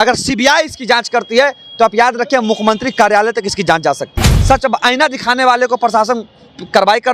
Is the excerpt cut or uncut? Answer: cut